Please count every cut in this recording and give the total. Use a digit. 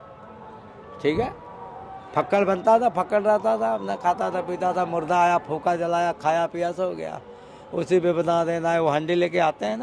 0